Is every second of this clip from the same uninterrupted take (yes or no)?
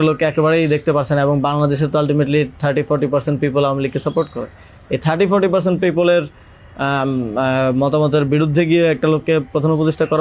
yes